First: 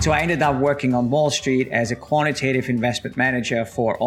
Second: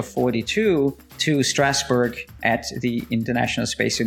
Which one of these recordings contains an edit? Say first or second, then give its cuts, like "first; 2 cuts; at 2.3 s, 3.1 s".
second; 2 cuts; at 1.1 s, 2.4 s